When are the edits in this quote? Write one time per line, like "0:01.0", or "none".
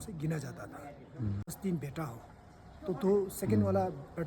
0:01.5

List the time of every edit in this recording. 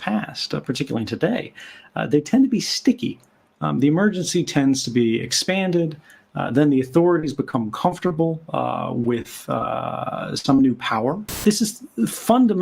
0:11.4

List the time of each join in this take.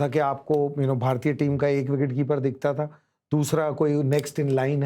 none

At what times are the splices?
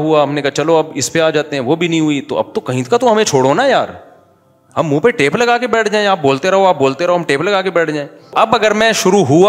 0:08.2

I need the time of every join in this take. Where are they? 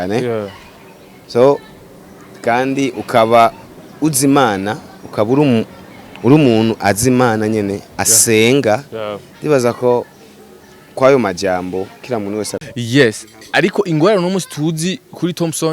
0:12.7

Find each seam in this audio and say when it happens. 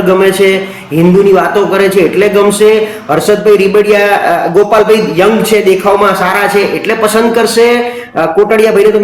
none

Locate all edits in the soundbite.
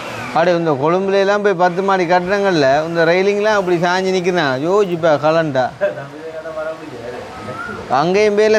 none

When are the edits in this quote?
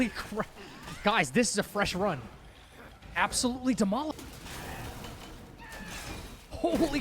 0:04.1

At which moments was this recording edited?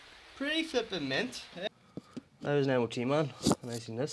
0:01.7

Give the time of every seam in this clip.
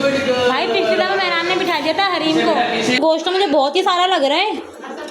0:03.0

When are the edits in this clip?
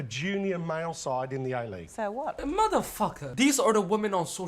0:02.4
0:03.2

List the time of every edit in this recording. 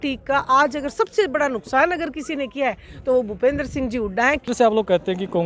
0:04.5

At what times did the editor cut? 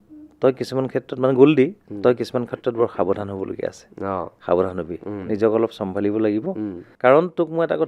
0:06.8

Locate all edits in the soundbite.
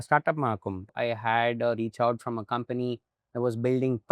0:00.9

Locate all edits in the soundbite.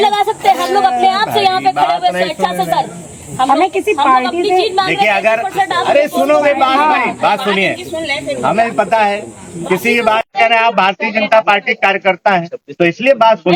none

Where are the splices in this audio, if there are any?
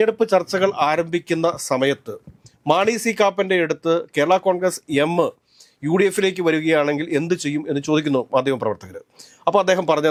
none

